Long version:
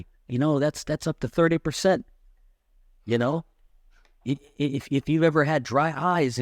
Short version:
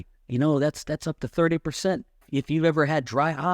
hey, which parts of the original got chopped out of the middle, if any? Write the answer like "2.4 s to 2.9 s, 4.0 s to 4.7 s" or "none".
2.2 s to 4.8 s